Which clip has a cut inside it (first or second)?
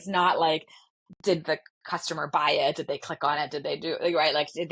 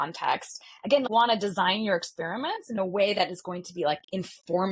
second